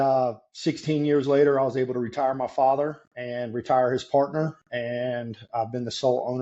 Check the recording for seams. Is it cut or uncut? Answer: uncut